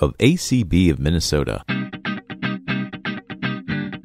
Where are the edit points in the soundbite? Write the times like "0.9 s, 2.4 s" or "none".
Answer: 1.6 s